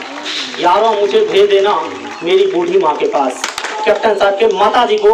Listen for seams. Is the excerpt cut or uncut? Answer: cut